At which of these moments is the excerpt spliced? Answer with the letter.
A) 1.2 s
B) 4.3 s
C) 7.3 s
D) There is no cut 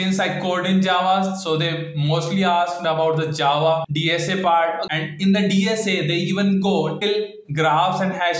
D